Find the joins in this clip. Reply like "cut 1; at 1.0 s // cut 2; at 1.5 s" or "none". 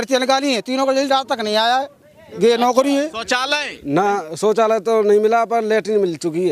cut 1; at 3.2 s